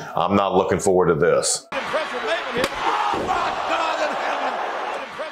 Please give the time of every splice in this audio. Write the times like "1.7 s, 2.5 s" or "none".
none